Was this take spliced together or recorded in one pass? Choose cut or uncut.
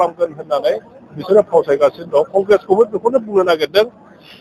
uncut